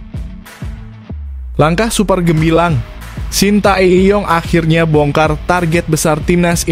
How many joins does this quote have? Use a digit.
1